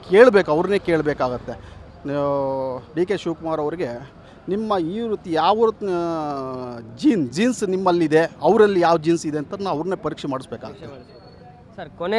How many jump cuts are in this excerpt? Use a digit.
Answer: 0